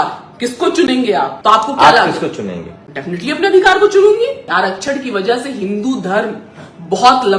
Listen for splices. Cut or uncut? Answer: cut